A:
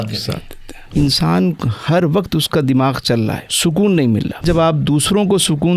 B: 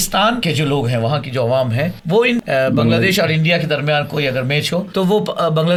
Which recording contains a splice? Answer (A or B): A